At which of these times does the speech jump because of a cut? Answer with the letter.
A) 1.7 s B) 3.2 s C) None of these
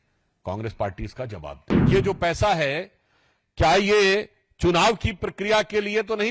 A